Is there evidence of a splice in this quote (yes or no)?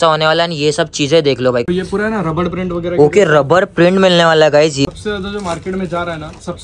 yes